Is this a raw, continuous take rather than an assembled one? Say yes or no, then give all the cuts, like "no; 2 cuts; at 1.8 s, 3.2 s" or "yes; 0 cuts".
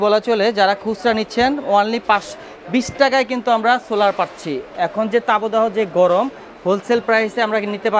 yes; 0 cuts